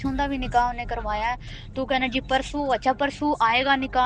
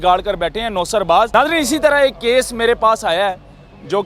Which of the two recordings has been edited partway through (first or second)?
second